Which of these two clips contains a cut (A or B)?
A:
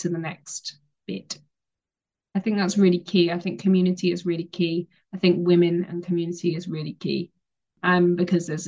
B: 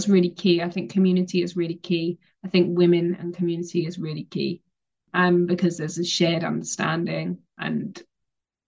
B